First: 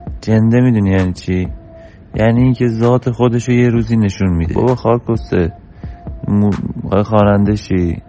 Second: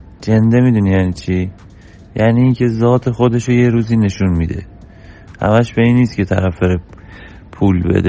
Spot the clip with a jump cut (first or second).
first